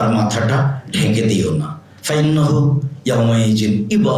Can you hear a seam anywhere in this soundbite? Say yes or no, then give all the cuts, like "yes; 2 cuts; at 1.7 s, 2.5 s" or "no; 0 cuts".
no; 0 cuts